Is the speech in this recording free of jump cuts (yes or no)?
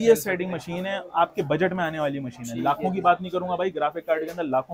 yes